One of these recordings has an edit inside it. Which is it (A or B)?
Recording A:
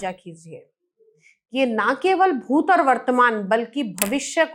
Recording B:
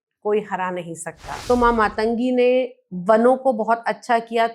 B